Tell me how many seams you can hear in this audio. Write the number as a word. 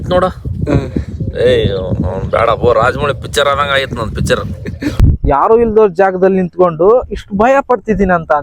one